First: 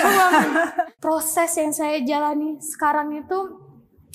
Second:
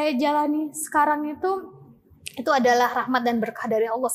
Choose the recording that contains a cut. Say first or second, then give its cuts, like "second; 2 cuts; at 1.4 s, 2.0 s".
first; 1 cut; at 0.9 s